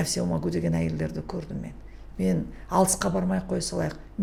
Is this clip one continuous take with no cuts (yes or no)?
yes